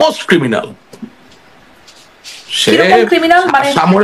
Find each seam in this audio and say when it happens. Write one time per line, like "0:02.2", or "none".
none